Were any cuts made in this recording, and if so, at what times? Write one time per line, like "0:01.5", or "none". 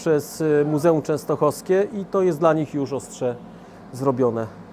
none

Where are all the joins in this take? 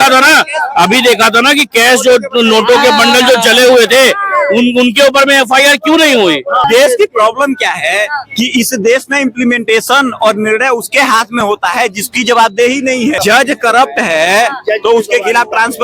0:06.6
0:13.2

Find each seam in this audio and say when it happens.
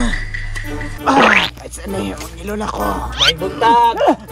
0:00.9

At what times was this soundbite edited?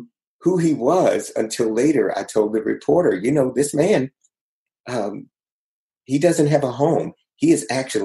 none

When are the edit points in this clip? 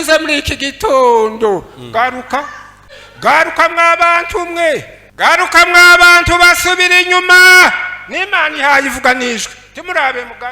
0:02.8
0:05.0

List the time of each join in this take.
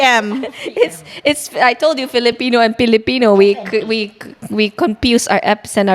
none

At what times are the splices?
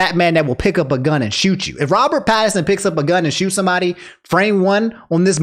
none

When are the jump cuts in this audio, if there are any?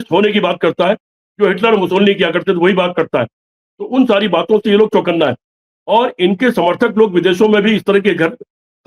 none

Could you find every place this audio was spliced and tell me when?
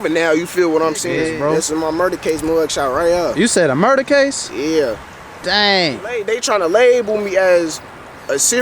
0:01.2
0:06.2

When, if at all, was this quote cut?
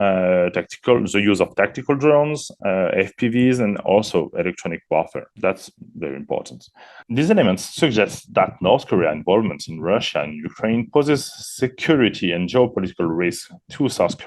0:07.0

